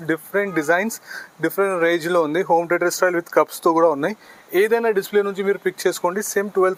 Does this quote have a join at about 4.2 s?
no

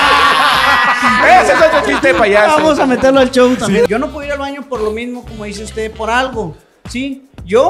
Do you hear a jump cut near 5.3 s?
no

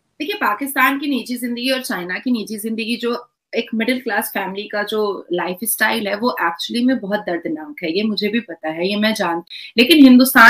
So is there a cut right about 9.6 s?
yes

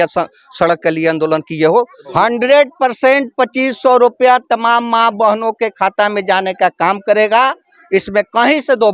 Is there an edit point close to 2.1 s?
yes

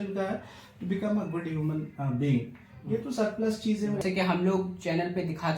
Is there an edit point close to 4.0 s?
yes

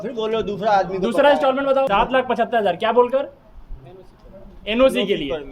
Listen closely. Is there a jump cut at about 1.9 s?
yes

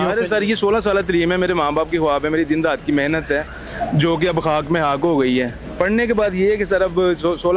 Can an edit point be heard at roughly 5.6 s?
yes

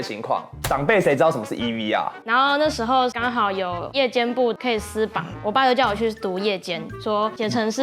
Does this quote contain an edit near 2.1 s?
yes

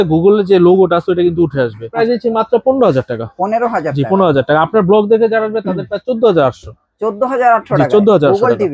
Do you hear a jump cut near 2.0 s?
yes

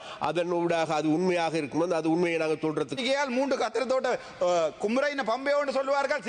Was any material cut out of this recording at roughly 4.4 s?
no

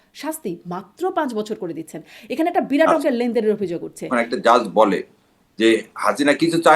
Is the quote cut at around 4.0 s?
yes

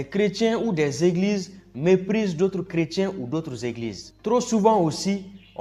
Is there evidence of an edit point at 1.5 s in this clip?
no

